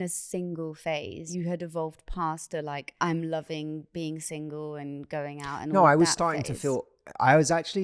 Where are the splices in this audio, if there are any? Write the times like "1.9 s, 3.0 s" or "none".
1.3 s, 2.9 s